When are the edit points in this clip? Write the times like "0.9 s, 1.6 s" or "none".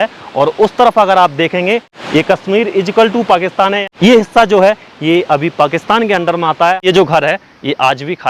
1.9 s, 3.8 s, 6.8 s

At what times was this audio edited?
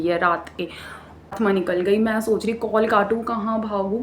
1.3 s

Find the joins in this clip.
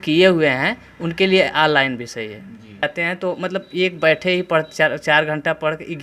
2.8 s

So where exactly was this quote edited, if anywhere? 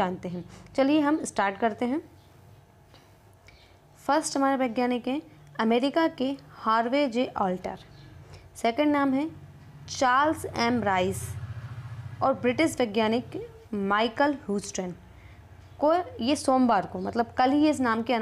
3.3 s

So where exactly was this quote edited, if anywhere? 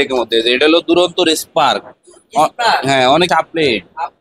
3.3 s

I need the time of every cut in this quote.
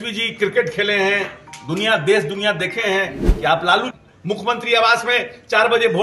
3.2 s

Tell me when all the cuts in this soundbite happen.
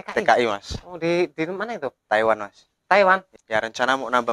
3.3 s

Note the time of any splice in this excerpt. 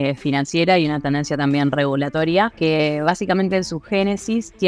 2.5 s

